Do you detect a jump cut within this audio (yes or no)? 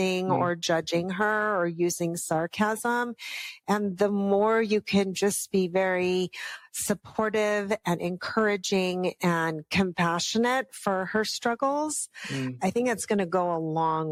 no